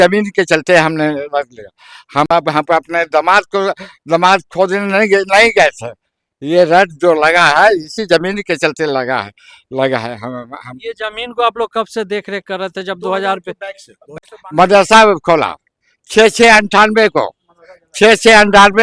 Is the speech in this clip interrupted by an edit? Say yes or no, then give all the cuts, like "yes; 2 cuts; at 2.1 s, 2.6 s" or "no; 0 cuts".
no; 0 cuts